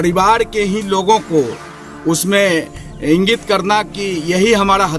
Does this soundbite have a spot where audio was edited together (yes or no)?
no